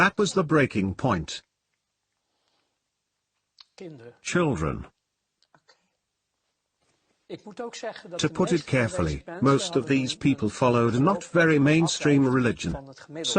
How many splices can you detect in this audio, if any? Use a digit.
1